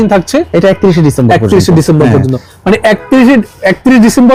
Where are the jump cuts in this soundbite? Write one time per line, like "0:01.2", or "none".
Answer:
none